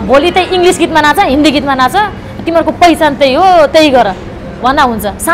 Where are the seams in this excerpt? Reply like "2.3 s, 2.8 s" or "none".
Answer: none